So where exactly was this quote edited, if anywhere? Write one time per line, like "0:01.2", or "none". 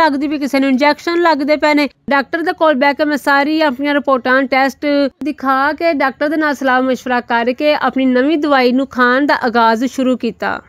0:02.0
0:05.2